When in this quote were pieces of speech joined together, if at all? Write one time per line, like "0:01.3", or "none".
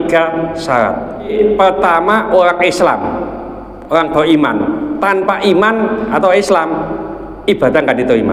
0:01.3